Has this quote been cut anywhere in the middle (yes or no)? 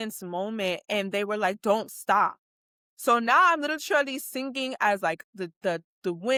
no